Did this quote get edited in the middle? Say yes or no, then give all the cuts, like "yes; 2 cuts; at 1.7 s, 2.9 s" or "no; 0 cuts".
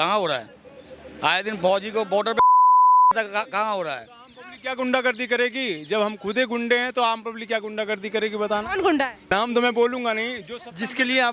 yes; 1 cut; at 9.3 s